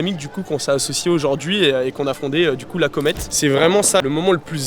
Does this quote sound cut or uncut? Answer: cut